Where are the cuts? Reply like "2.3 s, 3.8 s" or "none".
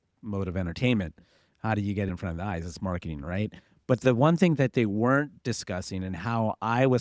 none

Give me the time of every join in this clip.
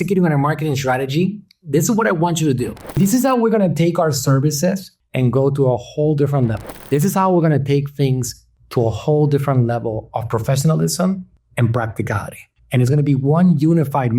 2.9 s

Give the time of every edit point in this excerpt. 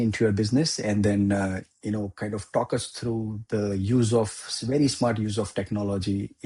none

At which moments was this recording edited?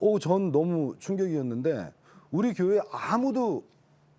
none

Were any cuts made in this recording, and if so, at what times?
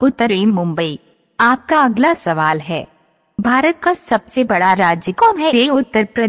1.1 s, 3.8 s

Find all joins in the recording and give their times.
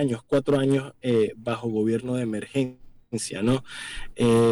none

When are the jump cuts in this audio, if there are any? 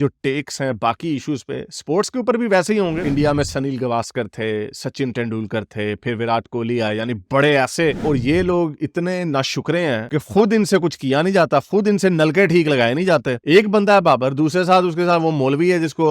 3.0 s, 8.0 s, 13.4 s

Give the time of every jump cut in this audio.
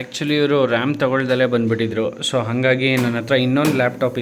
none

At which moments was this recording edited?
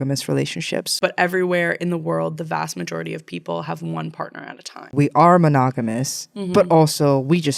0.9 s, 4.9 s

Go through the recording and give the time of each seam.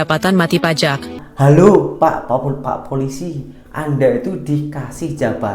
1.2 s

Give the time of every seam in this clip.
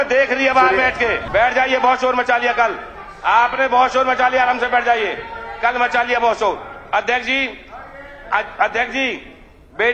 1.2 s

